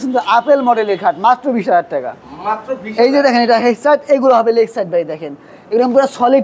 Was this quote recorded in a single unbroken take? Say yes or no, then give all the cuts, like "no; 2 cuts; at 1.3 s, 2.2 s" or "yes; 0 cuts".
yes; 0 cuts